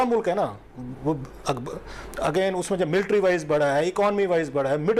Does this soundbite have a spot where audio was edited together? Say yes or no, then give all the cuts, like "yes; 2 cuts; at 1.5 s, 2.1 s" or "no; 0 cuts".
no; 0 cuts